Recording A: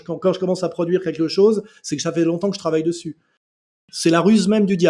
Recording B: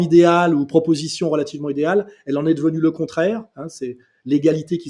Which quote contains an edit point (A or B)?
A